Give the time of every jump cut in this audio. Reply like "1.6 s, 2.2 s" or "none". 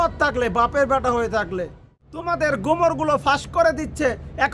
1.6 s